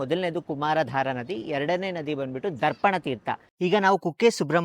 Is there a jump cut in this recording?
yes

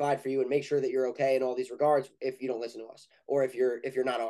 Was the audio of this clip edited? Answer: no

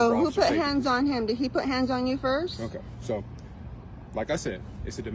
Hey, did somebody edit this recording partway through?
no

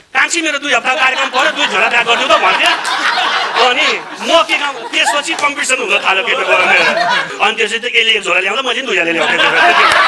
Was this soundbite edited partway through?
yes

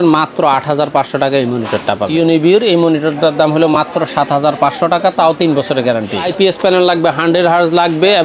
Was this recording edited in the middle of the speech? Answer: yes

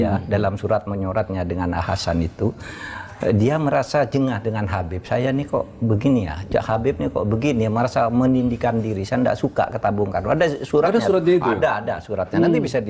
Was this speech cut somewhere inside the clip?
no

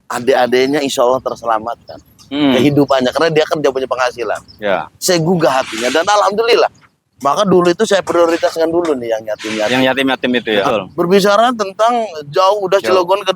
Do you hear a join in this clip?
yes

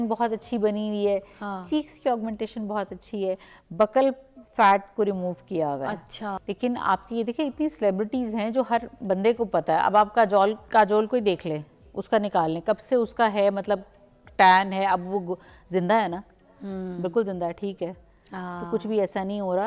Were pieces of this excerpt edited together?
yes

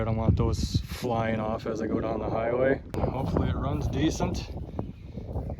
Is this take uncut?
no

